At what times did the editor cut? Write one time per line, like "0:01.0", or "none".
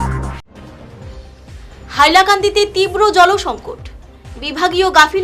none

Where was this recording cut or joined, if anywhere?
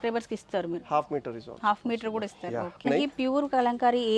0:02.9

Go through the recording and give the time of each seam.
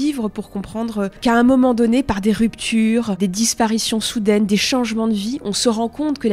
0:01.2
0:03.2

